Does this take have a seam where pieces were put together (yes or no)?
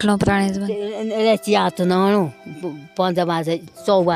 no